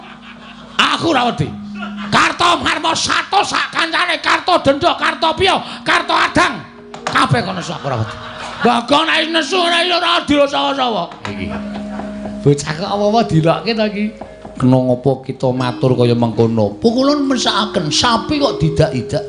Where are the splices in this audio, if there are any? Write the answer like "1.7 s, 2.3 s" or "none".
8.6 s, 11.3 s